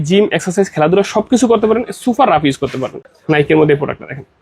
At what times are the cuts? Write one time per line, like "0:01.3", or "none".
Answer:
0:03.1